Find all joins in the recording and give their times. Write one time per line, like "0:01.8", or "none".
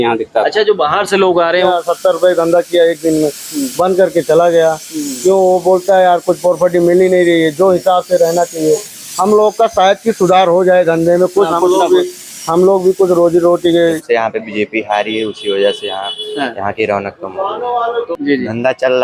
0:01.7
0:09.0
0:14.0
0:18.1